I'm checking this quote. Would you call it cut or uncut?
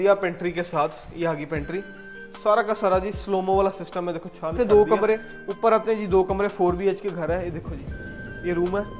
cut